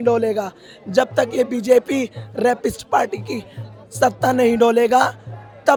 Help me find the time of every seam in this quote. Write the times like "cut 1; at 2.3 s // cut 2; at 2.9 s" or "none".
none